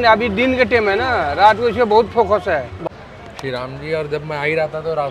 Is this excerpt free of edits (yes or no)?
no